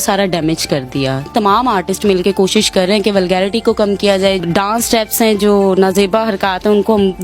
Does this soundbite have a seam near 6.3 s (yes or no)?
no